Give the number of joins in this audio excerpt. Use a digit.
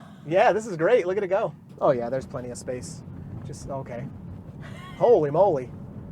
1